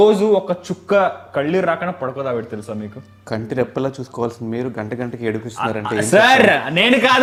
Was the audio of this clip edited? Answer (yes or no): no